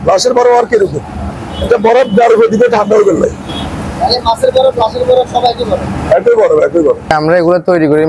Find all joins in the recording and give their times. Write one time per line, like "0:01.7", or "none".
none